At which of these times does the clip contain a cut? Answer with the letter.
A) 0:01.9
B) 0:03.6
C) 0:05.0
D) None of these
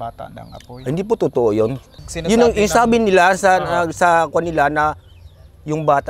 A